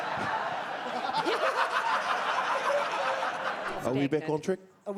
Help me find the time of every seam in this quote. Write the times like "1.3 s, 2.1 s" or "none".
3.7 s